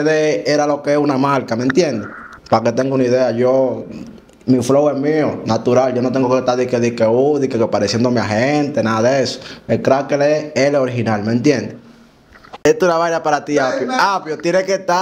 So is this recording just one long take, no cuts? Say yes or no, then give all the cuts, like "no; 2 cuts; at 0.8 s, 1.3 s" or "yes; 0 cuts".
no; 1 cut; at 12.6 s